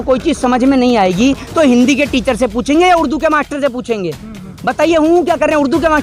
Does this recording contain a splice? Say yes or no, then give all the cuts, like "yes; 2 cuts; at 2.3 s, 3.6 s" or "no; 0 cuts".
no; 0 cuts